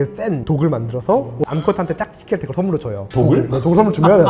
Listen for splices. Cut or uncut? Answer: cut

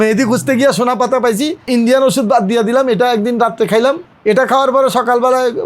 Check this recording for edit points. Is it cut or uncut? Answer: cut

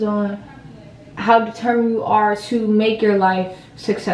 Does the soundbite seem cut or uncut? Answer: uncut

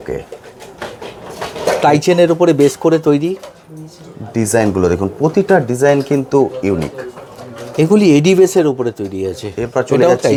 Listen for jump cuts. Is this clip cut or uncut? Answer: uncut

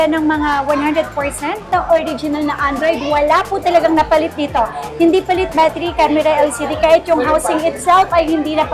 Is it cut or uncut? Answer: uncut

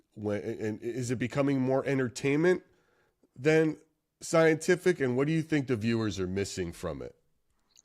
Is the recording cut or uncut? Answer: uncut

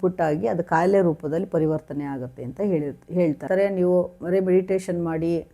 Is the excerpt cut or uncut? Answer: cut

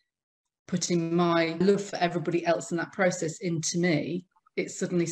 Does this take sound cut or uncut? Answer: uncut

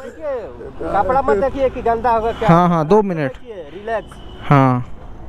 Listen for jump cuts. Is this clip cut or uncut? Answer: uncut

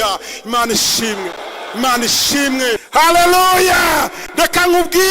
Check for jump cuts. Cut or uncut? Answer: cut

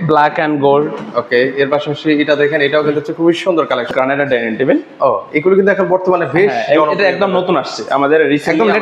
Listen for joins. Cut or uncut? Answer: cut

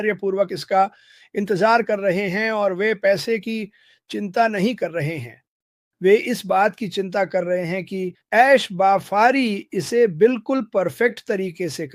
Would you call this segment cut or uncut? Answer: uncut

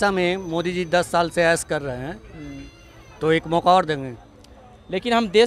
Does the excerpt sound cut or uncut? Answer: uncut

